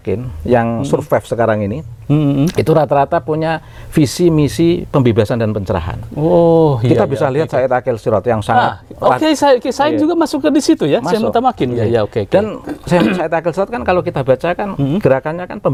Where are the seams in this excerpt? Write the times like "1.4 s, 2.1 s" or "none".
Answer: none